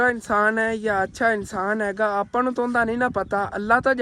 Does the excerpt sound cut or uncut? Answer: uncut